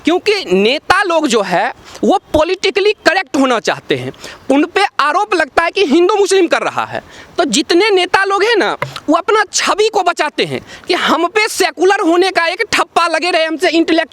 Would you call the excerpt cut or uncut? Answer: uncut